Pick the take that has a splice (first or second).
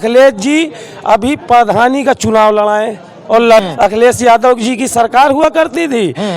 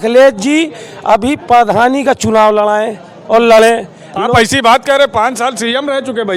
first